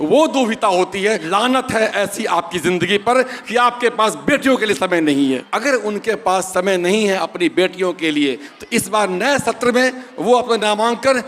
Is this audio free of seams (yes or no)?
no